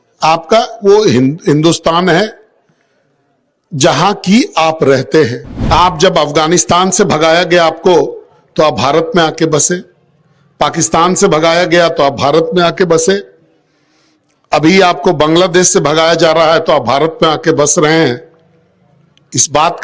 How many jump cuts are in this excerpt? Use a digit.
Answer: 1